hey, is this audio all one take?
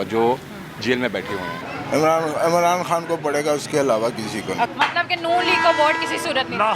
no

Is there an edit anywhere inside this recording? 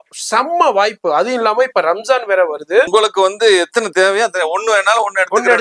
yes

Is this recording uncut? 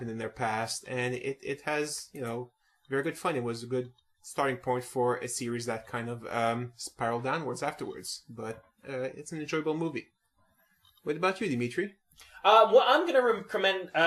no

